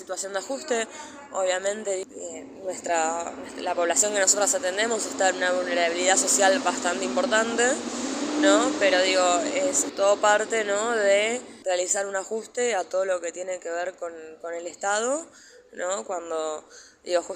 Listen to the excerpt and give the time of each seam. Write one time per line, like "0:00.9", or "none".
0:02.0
0:09.8
0:11.5